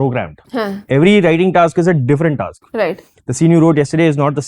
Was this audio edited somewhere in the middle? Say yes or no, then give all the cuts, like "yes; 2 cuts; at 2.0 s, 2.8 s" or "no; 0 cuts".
no; 0 cuts